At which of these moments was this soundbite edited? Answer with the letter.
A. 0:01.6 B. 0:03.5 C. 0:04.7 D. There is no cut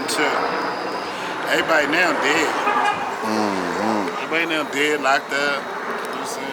D